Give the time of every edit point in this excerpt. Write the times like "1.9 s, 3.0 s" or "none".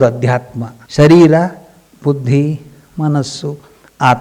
none

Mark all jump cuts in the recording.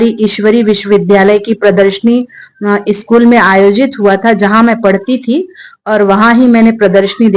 none

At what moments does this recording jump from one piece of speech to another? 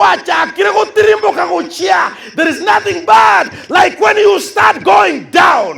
none

